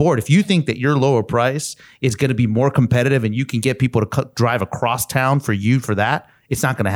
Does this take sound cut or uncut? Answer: uncut